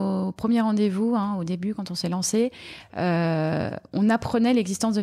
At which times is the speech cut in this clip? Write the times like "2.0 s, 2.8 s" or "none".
none